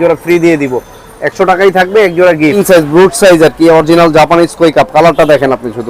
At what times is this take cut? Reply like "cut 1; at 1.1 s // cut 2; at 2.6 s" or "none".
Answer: cut 1; at 2.6 s